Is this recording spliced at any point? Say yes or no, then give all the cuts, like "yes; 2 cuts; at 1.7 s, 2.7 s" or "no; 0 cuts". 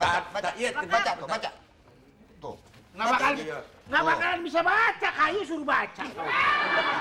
no; 0 cuts